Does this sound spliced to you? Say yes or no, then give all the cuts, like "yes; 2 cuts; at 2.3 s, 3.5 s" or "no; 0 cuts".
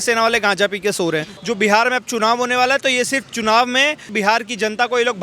yes; 2 cuts; at 1.3 s, 4.1 s